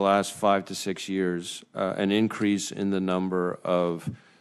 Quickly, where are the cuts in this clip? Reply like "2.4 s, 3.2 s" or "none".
none